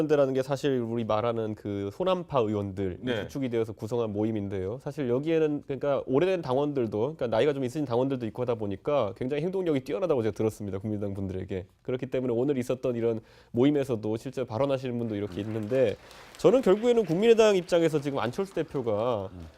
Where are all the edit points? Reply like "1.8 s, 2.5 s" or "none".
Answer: 10.2 s

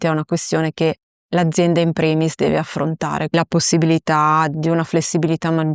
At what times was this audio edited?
3.3 s

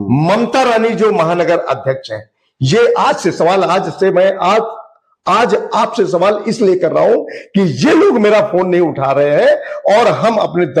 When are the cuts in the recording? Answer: none

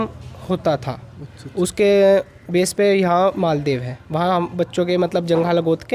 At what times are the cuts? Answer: none

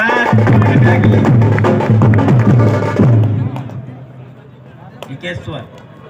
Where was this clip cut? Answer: 2.4 s

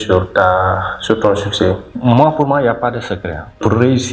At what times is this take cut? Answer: 1.9 s

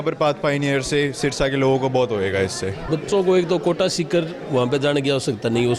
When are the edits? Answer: 2.8 s

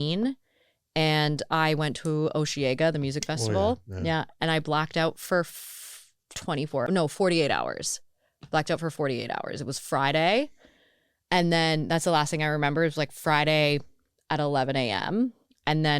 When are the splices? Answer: 6.9 s

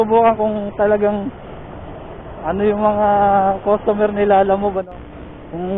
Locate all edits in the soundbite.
4.8 s

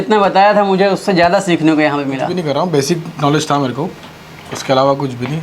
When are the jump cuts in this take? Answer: 2.3 s

